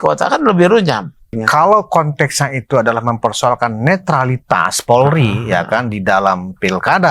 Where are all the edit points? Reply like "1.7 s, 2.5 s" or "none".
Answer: 1.3 s, 5.4 s